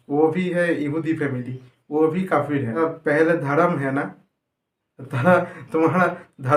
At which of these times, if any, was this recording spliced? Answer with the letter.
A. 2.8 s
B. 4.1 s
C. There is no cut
A